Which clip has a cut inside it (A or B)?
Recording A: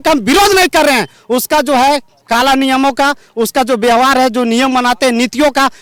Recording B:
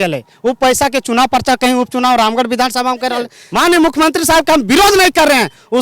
B